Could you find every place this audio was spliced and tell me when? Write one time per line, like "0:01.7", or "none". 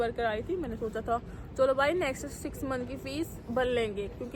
none